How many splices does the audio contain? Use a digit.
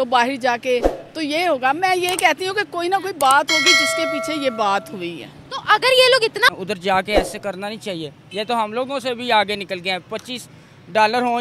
1